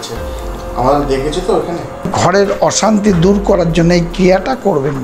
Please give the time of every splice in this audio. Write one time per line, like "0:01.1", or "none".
0:02.1